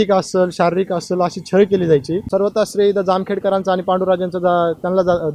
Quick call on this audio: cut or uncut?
cut